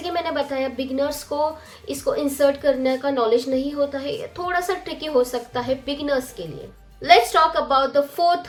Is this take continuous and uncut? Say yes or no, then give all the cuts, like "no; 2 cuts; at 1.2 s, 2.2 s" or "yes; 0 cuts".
yes; 0 cuts